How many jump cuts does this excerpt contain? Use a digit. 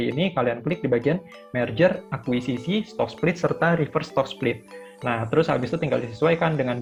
0